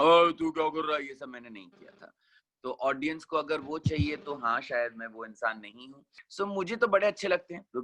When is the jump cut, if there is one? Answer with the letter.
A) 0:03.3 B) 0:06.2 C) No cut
B